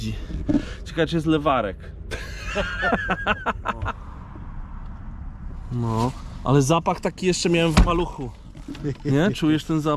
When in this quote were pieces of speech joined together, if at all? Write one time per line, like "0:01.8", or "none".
0:04.0